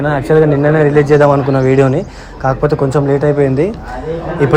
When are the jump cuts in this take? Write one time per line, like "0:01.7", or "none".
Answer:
none